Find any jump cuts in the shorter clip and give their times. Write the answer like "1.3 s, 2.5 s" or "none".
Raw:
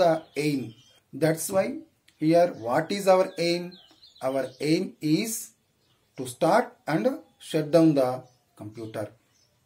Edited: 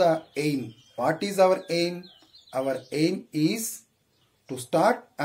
0.9 s